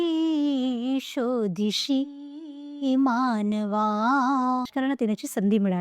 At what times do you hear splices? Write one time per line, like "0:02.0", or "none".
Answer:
0:04.7